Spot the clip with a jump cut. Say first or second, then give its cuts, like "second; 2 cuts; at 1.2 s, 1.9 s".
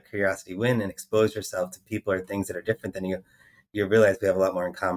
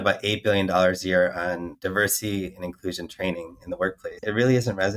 second; 2 cuts; at 1.7 s, 4.2 s